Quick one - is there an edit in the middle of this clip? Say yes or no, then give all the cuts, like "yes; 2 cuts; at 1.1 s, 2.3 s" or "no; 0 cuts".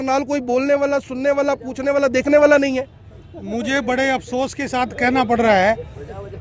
no; 0 cuts